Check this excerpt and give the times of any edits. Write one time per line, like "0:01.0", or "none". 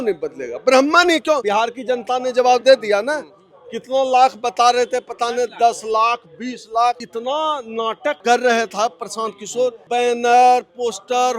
0:01.4
0:07.0
0:08.2
0:09.8